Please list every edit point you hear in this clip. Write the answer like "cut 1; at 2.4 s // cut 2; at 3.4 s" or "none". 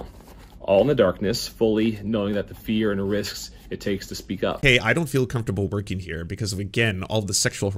cut 1; at 4.6 s